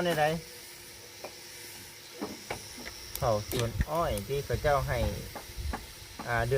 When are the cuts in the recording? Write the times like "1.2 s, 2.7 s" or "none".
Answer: 2.7 s